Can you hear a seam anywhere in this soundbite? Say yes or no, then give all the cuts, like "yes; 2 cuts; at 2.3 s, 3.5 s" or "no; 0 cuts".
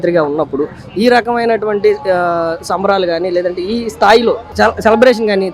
yes; 1 cut; at 4.5 s